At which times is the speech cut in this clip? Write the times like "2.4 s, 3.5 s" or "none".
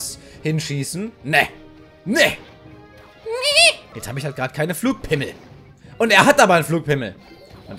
3.8 s